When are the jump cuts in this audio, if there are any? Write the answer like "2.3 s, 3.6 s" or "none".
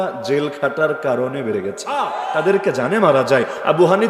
2.1 s

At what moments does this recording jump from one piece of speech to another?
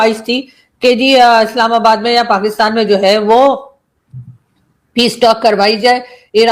none

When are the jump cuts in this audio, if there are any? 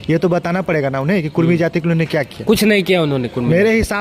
none

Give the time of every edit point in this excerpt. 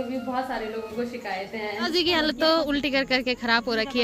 1.9 s

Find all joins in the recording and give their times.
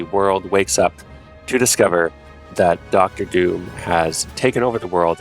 2.8 s

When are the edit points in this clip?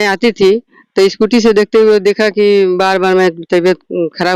none

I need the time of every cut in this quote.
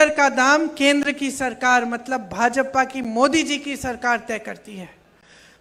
none

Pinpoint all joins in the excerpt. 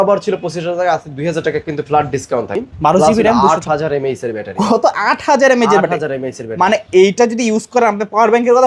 2.5 s

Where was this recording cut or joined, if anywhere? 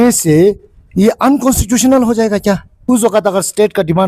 2.8 s

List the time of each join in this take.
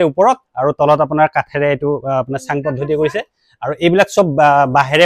none

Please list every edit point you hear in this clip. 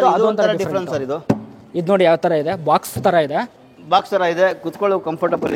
none

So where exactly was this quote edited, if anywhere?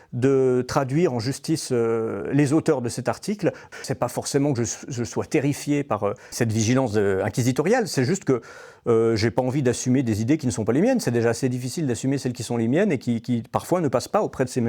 3.7 s, 6.2 s

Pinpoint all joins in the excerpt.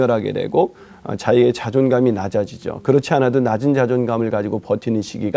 none

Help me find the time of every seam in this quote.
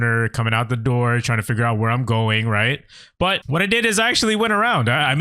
3.4 s

